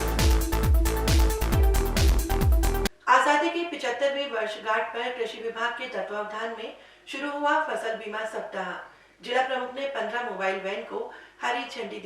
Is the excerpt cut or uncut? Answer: cut